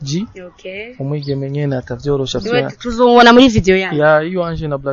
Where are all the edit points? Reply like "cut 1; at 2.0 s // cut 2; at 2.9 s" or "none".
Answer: none